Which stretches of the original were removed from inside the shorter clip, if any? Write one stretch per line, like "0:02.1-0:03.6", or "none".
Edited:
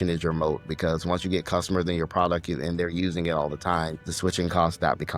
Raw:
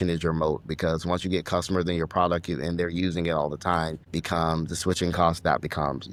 0:04.1-0:04.7

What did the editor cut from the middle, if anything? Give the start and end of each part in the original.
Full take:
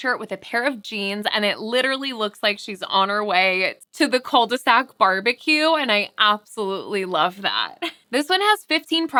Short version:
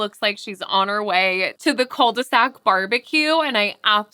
0:03.7-0:03.9

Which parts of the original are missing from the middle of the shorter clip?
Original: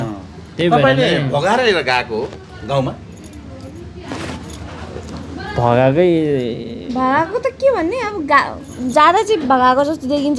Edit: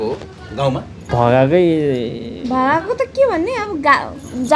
0:03.1-0:05.4

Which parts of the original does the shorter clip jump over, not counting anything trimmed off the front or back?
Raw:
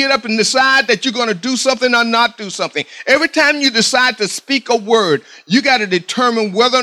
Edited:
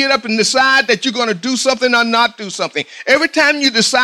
none

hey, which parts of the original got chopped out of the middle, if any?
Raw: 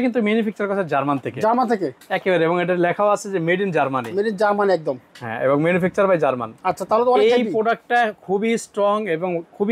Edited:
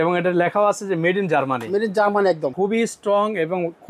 0:04.9-0:08.2

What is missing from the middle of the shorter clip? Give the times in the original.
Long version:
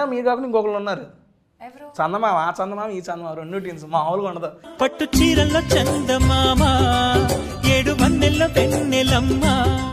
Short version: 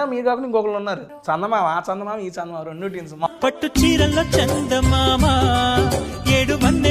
0:01.1-0:01.8
0:04.0-0:04.6

